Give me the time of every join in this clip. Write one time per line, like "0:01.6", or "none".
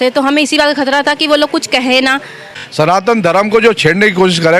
0:02.7